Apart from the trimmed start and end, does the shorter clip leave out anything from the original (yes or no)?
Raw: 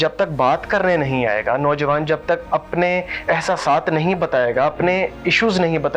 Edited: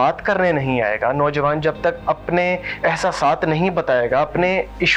no